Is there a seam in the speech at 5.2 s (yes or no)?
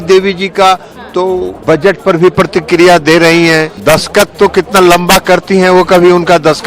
no